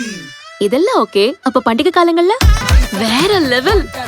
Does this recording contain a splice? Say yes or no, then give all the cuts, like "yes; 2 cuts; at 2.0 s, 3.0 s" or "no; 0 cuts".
yes; 1 cut; at 2.7 s